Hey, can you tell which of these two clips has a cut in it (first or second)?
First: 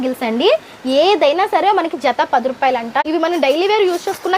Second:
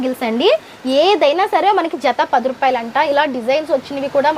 first